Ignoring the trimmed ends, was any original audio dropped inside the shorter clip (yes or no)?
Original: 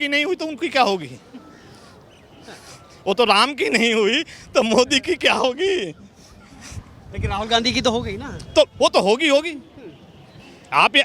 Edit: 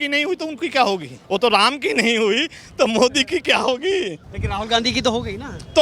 yes